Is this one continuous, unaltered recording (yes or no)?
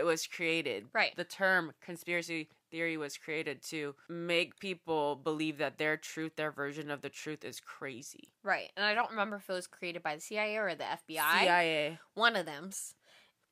no